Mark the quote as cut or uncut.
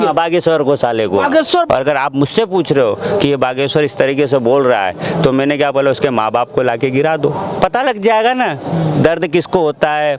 cut